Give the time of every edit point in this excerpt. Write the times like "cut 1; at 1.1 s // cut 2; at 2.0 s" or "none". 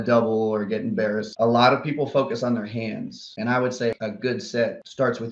cut 1; at 1.3 s // cut 2; at 3.3 s // cut 3; at 4.0 s

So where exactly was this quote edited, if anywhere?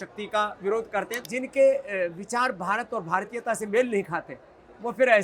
cut 1; at 1.1 s

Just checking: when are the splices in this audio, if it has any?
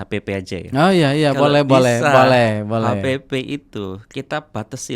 none

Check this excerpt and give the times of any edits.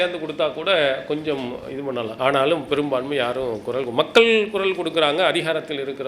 cut 1; at 2.1 s

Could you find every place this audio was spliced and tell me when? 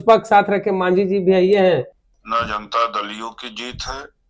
cut 1; at 1.9 s

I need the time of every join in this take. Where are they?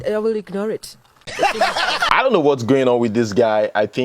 cut 1; at 2.1 s

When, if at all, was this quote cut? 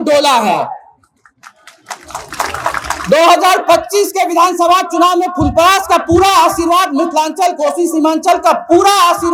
none

